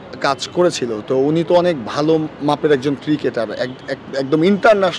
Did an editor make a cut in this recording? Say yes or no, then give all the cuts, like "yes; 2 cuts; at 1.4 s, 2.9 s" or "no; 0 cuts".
no; 0 cuts